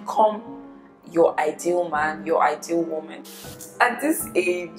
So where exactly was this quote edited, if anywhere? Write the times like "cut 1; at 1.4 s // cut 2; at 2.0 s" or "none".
cut 1; at 3.1 s